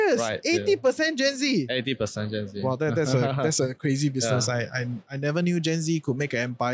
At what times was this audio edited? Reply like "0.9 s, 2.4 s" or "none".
none